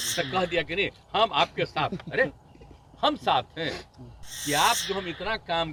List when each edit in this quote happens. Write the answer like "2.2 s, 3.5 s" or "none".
none